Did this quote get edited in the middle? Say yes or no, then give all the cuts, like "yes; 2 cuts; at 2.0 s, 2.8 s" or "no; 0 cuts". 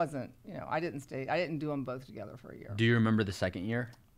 no; 0 cuts